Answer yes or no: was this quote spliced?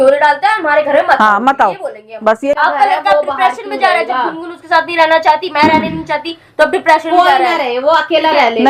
yes